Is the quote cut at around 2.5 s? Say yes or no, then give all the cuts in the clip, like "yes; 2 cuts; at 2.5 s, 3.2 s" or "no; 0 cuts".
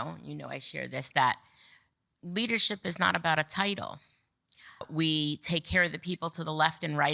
no; 1 cut; at 4.9 s